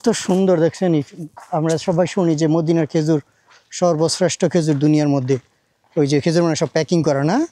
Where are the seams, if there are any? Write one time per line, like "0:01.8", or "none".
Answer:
none